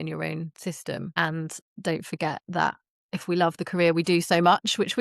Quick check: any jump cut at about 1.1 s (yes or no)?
yes